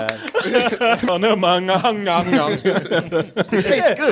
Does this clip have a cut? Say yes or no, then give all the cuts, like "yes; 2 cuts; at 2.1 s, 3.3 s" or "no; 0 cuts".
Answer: yes; 1 cut; at 1.0 s